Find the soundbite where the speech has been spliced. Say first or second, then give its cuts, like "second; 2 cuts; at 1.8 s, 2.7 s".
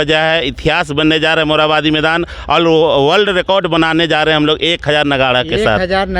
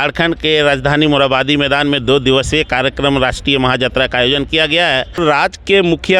second; 1 cut; at 5.2 s